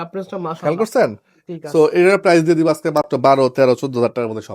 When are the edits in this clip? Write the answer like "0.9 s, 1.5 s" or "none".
none